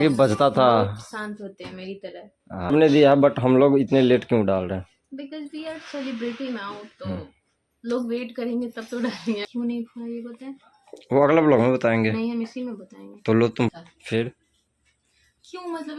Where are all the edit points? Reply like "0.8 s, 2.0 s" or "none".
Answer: 2.7 s, 9.5 s, 13.7 s

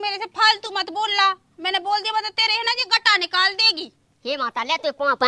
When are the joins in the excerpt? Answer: none

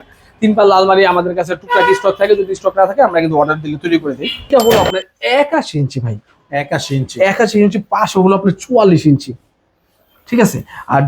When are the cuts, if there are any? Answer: 4.5 s

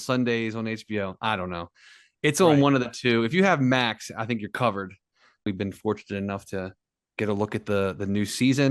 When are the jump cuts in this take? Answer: 5.5 s

